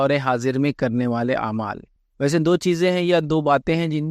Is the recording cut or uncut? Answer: uncut